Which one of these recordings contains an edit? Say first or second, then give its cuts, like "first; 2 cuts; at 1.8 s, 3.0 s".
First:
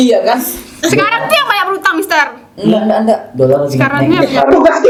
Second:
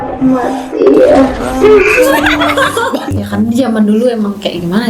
second; 1 cut; at 3.0 s